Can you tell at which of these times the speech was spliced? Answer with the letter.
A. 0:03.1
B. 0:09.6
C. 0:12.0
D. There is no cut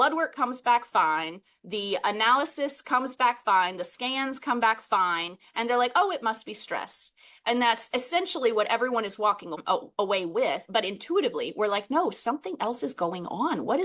B